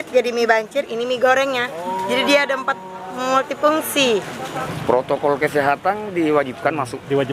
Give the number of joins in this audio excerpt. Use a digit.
1